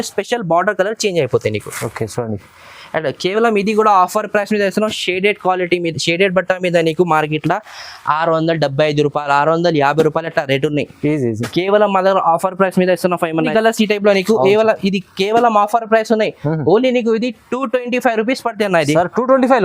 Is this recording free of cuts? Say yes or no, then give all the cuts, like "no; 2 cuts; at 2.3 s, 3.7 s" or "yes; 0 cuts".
no; 1 cut; at 13.5 s